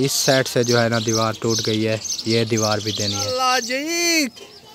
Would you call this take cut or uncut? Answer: cut